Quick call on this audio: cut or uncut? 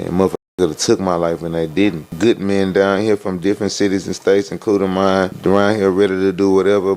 cut